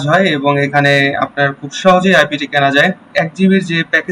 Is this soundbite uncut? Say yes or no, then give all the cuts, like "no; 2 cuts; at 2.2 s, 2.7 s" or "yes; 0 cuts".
no; 1 cut; at 3.1 s